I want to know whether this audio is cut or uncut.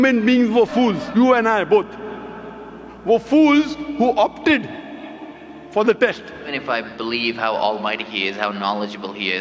cut